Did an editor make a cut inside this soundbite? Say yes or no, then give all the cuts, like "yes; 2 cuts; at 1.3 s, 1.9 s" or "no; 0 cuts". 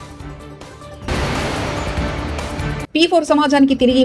no; 0 cuts